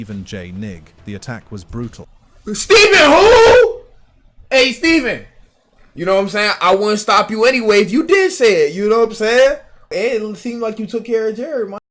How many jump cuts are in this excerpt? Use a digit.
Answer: 1